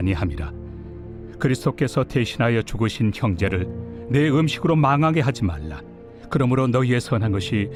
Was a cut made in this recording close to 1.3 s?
no; 0 cuts

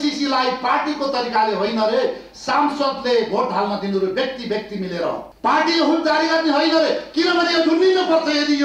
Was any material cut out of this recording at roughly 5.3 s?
yes; 1 cut; at 5.3 s

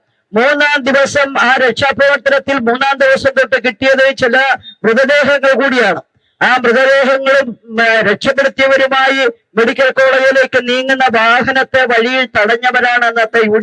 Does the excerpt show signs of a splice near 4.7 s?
no; 0 cuts

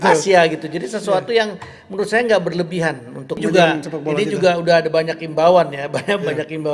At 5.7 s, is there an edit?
no; 1 cut; at 3.4 s

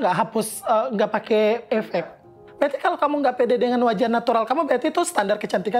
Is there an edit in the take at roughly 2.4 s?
yes; 1 cut; at 2.4 s

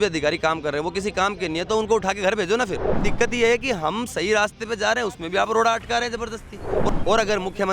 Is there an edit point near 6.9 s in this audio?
yes; 2 cuts; at 3.1 s, 6.9 s

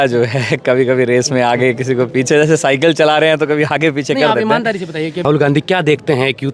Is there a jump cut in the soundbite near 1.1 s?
no; 1 cut; at 5.2 s

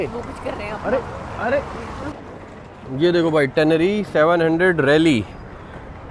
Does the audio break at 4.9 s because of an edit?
no; 1 cut; at 2.1 s

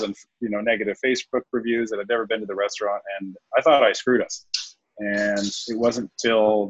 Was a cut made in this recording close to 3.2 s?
no; 0 cuts

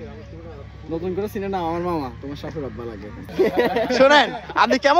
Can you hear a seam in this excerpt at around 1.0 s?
no; 1 cut; at 3.2 s

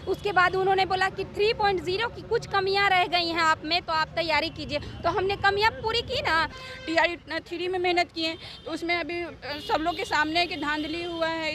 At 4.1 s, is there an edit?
no; 1 cut; at 6.5 s

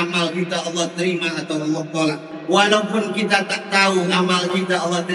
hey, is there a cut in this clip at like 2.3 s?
yes; 1 cut; at 2.3 s

